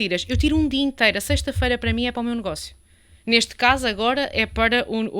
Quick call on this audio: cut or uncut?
uncut